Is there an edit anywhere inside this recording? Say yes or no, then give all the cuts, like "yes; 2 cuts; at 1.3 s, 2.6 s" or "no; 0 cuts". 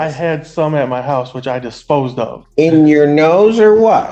yes; 1 cut; at 2.4 s